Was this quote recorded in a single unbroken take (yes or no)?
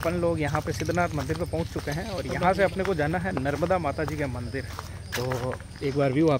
yes